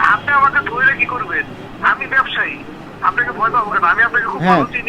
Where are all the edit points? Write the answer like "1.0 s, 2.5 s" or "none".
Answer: none